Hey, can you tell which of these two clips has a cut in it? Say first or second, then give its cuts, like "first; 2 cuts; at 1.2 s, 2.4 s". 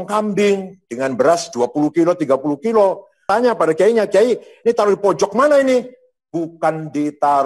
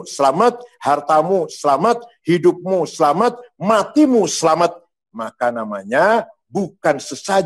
first; 1 cut; at 3.3 s